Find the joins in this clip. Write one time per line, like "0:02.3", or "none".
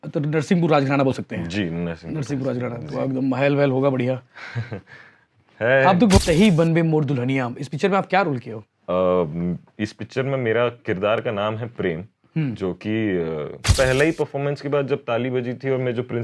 0:06.2
0:13.7